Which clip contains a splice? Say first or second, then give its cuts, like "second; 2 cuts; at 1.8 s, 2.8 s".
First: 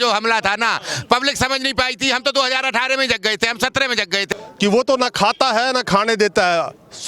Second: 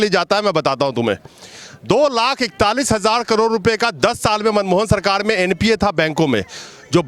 first; 1 cut; at 4.2 s